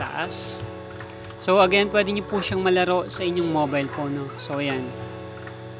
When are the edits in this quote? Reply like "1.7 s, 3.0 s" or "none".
none